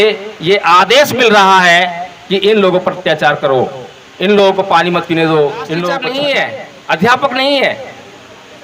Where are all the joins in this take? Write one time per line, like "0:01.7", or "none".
0:06.3